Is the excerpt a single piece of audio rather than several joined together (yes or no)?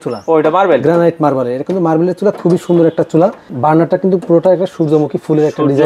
no